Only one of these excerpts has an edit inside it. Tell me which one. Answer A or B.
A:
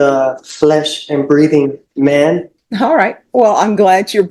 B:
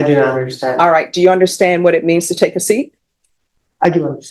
A